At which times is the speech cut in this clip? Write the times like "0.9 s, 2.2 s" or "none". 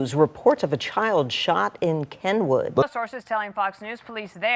2.9 s